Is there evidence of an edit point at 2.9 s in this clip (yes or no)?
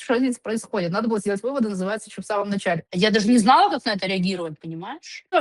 yes